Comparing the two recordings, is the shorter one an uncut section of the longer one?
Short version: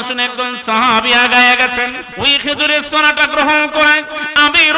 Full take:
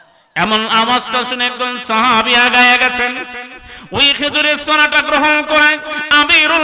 no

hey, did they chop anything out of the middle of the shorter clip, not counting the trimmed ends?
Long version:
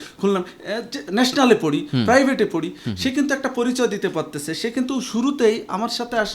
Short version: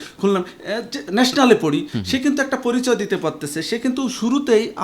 yes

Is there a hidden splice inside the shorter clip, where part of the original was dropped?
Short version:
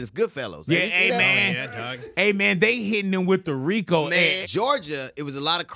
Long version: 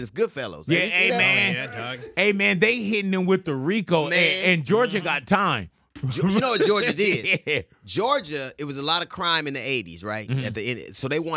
yes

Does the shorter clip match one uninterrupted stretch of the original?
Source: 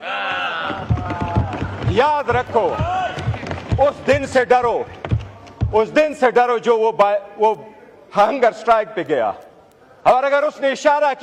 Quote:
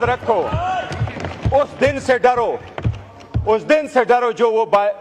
yes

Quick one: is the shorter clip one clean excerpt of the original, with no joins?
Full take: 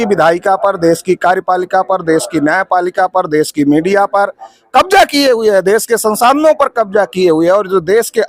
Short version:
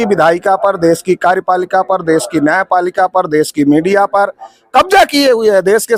yes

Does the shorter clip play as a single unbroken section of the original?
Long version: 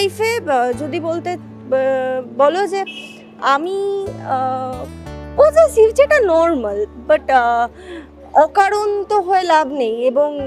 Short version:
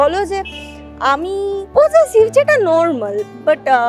no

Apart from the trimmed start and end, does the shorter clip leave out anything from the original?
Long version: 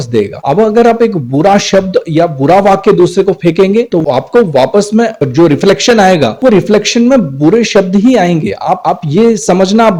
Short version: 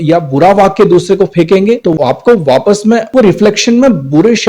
yes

